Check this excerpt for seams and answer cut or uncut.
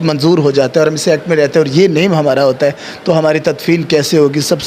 uncut